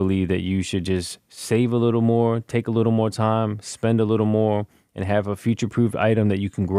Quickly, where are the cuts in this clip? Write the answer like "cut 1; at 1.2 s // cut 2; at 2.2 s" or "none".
none